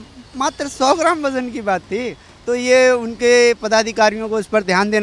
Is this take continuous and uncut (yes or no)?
yes